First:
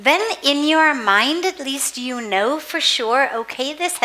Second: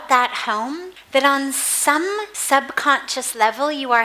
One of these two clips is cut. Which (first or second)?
second